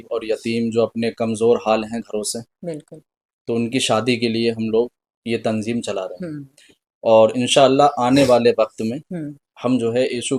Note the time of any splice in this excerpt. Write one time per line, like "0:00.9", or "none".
none